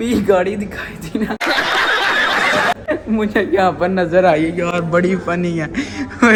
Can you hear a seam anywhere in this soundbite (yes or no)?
no